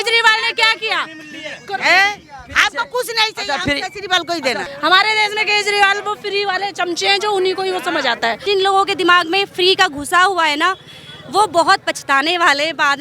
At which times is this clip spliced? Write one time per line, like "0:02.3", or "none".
0:04.6
0:08.4